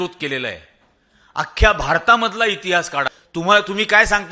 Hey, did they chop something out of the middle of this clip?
yes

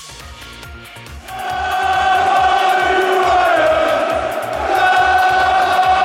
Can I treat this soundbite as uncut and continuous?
no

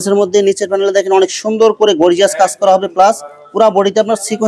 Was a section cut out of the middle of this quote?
no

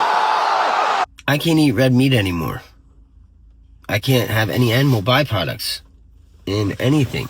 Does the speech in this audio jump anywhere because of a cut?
yes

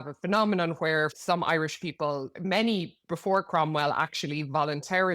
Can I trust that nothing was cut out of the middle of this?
no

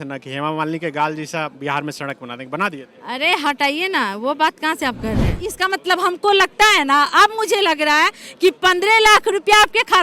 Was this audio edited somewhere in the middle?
yes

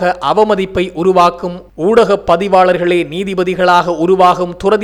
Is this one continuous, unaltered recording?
yes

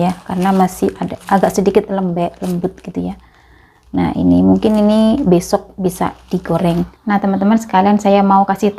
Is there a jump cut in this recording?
yes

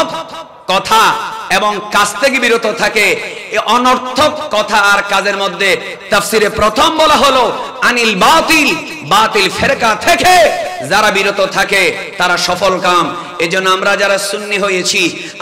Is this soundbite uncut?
yes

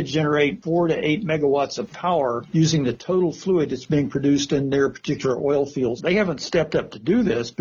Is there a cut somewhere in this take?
yes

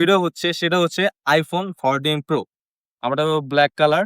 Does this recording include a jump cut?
yes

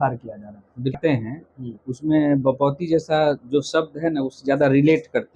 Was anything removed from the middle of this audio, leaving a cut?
yes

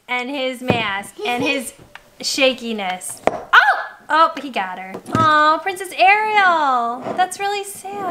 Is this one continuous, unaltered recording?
no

